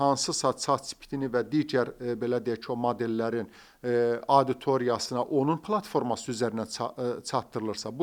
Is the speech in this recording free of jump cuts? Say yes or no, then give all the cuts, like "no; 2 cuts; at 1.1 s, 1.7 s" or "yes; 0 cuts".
yes; 0 cuts